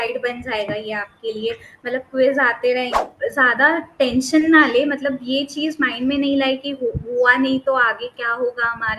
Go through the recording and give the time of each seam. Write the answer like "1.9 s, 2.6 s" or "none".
3.0 s